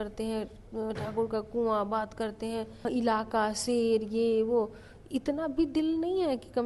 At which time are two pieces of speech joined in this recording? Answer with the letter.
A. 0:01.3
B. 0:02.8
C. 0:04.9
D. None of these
B